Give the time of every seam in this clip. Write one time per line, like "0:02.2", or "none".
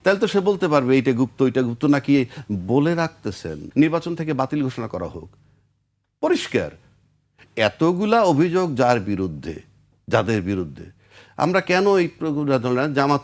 0:03.6

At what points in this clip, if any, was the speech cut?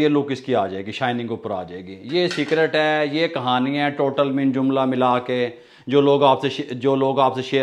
none

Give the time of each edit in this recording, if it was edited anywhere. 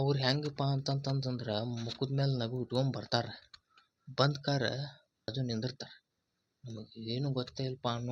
0:05.3

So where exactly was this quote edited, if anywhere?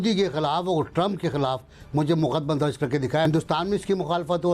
0:03.2

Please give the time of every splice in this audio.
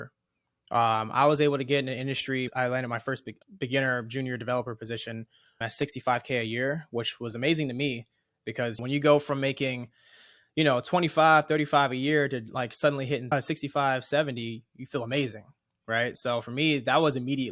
0:02.5
0:03.3
0:05.6
0:08.8
0:13.3

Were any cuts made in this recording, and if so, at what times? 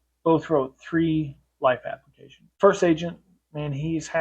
0:02.5

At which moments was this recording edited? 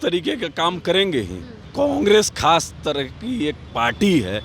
0:01.7

